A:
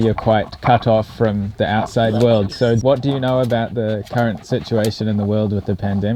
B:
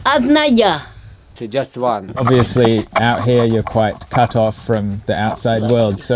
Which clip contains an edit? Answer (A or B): B